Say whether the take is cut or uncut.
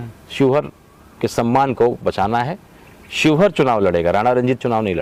uncut